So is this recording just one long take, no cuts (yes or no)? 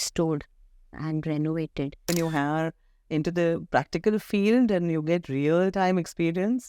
no